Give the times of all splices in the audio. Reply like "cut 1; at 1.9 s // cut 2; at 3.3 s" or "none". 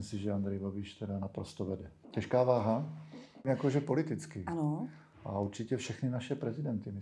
cut 1; at 2.0 s // cut 2; at 3.5 s